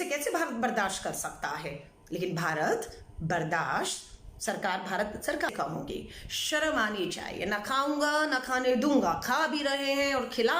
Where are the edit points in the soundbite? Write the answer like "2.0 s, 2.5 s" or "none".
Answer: 5.5 s